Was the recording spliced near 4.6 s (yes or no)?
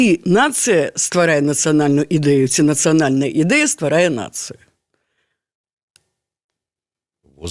no